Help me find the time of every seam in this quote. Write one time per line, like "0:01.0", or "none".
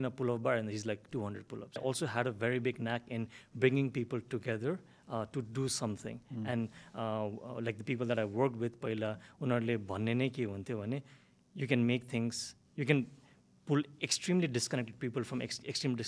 0:01.8

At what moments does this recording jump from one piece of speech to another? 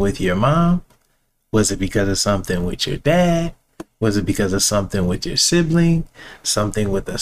none

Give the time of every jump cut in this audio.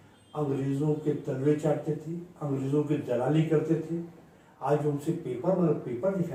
none

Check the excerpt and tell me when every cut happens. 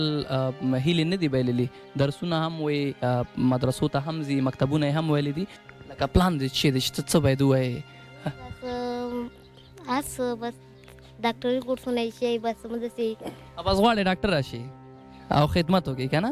0:05.6

